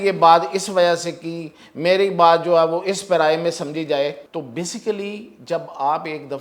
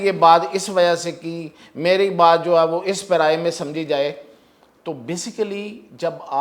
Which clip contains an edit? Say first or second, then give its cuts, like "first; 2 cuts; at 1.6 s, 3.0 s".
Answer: first; 1 cut; at 4.2 s